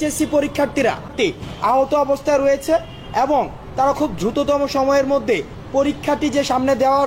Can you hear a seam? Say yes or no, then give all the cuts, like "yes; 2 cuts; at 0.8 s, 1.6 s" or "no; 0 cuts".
yes; 1 cut; at 1.1 s